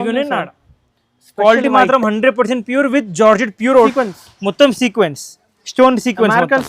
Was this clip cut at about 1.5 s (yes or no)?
no